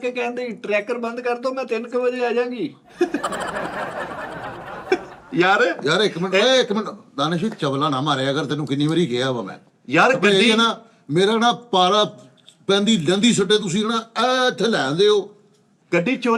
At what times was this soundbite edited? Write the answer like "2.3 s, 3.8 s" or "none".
none